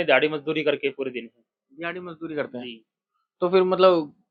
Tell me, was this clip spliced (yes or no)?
no